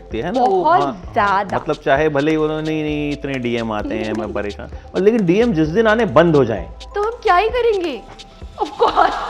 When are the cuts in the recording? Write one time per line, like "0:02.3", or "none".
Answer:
none